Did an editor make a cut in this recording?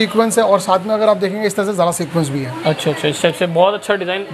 no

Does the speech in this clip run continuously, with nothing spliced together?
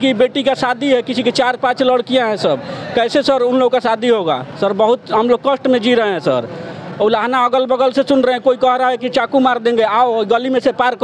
yes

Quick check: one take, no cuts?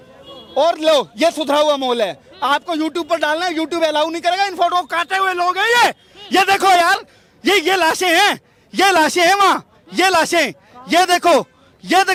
yes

